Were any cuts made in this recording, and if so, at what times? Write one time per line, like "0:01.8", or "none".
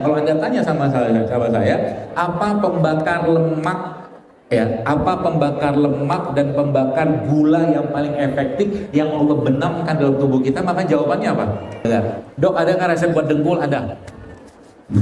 0:11.9